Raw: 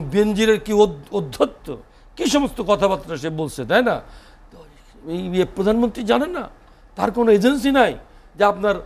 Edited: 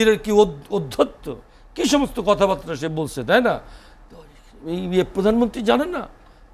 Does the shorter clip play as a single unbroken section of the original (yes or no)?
yes